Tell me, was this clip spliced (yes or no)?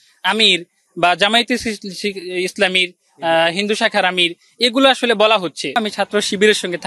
yes